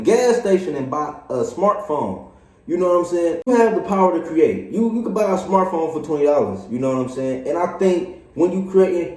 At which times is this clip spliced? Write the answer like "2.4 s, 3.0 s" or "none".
3.5 s